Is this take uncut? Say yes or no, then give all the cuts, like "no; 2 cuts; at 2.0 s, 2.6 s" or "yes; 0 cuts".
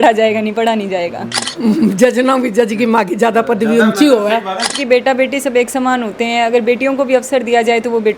no; 2 cuts; at 1.4 s, 4.8 s